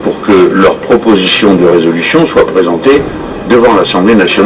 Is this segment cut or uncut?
uncut